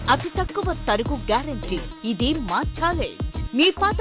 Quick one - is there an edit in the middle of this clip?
no; 0 cuts

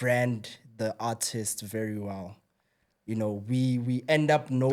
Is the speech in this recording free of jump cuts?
yes; 0 cuts

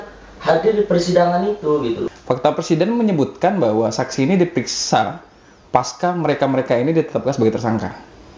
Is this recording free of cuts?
no; 1 cut; at 2.0 s

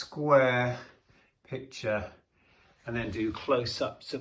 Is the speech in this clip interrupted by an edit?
no; 0 cuts

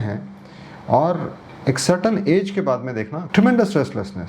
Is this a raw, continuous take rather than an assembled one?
no; 1 cut; at 3.2 s

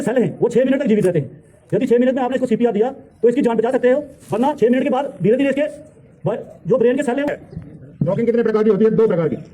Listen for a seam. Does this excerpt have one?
yes; 1 cut; at 7.3 s

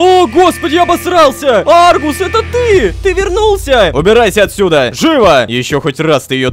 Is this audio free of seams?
no; 2 cuts; at 3.9 s, 5.5 s

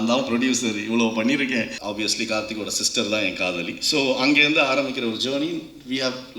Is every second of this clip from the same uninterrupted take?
no; 1 cut; at 1.8 s

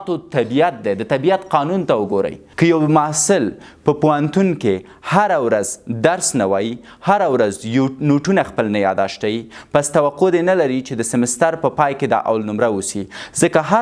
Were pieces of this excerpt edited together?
yes; 1 cut; at 2.4 s

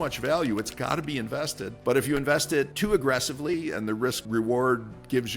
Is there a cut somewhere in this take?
yes; 3 cuts; at 1.7 s, 2.7 s, 4.2 s

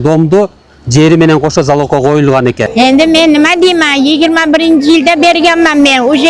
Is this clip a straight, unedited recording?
no; 1 cut; at 2.6 s

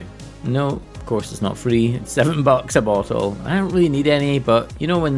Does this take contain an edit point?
no; 0 cuts

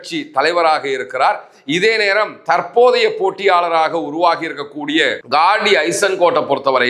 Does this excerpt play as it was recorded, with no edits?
yes; 0 cuts

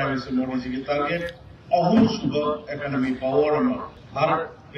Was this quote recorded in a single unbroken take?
yes; 0 cuts

